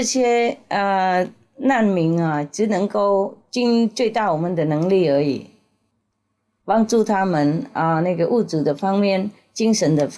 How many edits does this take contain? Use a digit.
0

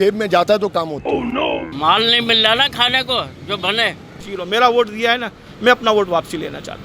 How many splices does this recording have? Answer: 2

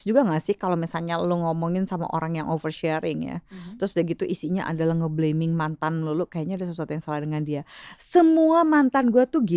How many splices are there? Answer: 0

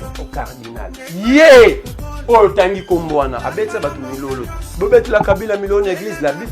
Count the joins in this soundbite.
1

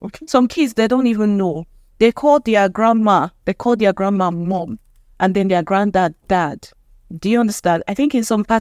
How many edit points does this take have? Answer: 0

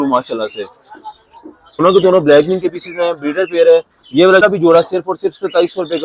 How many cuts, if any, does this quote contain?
2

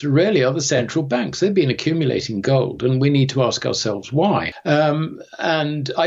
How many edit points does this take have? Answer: 1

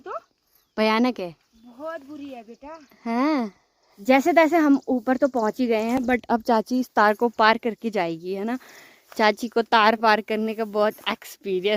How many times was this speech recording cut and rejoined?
0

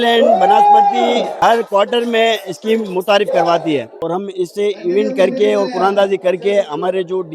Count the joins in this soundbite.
2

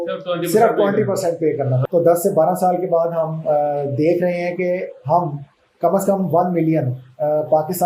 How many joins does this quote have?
1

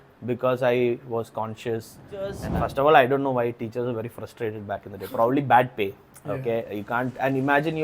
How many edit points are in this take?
1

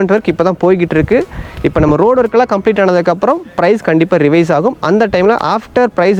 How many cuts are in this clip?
0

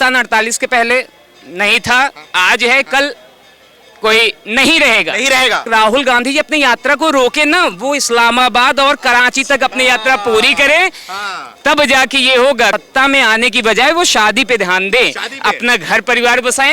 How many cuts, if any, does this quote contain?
2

